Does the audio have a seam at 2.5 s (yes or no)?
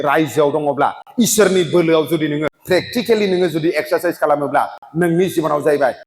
yes